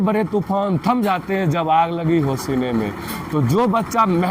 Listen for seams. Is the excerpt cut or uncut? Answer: uncut